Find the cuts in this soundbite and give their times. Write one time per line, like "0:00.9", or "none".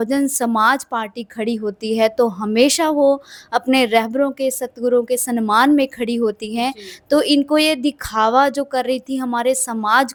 none

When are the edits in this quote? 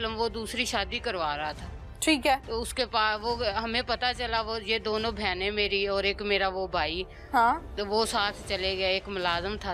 none

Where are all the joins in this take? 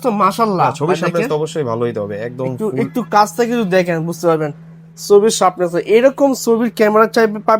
none

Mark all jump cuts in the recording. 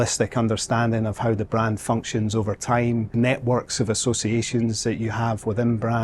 0:03.1

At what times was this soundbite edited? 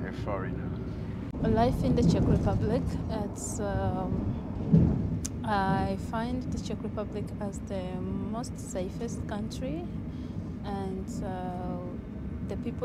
none

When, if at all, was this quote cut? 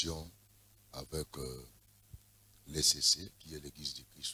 none

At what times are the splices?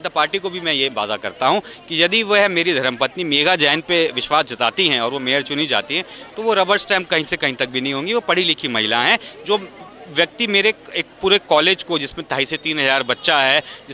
none

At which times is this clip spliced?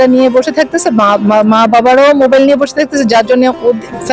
none

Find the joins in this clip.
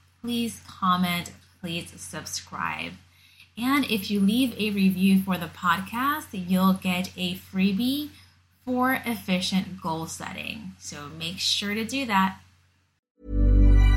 0:12.9

